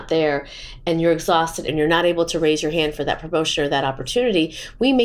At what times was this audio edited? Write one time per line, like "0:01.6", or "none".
0:01.7

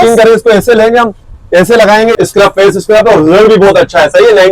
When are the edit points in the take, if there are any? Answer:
0:02.1

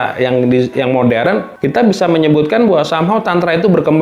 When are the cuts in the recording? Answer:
0:01.5

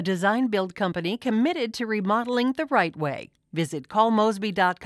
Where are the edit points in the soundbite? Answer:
none

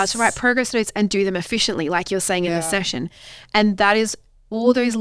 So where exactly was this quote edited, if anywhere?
none

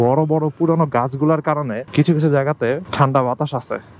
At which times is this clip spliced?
0:01.8
0:02.9

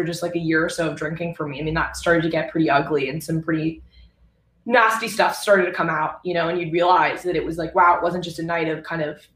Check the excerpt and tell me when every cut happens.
none

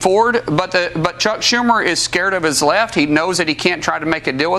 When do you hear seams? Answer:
none

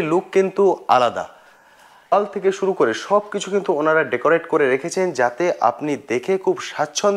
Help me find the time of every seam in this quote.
0:02.1

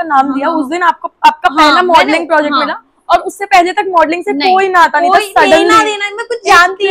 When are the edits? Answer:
none

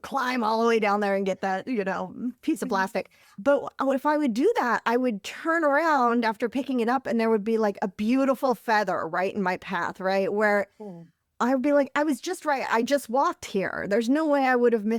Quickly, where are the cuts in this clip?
none

